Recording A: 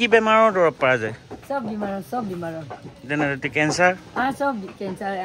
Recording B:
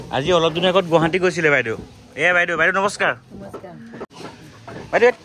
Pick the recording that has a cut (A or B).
B